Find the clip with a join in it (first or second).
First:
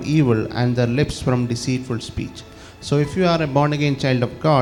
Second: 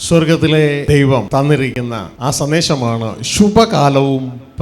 second